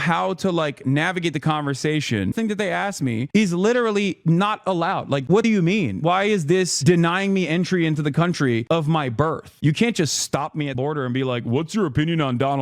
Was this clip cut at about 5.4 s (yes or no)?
yes